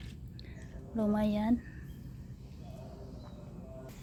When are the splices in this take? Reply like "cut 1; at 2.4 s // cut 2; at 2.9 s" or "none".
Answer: none